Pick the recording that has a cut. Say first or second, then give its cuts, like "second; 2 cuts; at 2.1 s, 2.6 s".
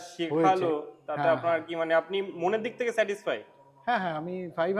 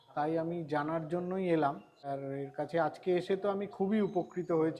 second; 1 cut; at 2.0 s